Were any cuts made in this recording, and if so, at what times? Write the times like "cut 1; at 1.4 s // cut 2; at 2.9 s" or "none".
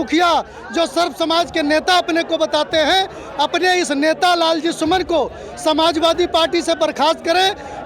none